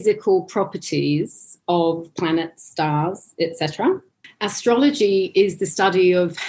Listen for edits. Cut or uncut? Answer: uncut